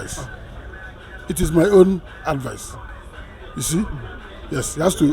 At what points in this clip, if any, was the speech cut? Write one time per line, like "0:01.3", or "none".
none